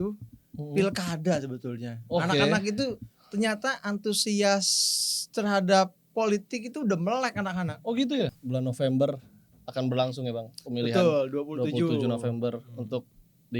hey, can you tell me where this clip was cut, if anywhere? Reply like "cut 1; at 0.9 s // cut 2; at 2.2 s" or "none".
cut 1; at 8.4 s